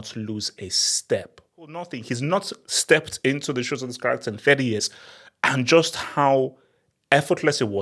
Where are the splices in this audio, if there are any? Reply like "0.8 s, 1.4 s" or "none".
2.0 s